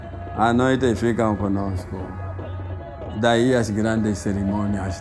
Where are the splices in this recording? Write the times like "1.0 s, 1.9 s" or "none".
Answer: none